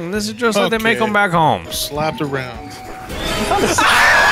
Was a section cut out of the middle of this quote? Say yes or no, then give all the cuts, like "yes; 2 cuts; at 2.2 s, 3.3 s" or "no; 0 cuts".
yes; 1 cut; at 1.7 s